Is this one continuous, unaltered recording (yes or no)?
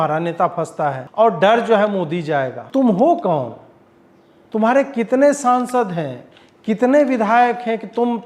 no